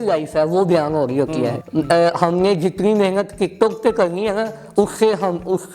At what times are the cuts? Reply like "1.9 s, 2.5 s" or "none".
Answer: 1.6 s